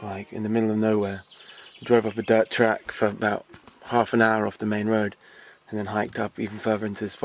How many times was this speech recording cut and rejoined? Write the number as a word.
one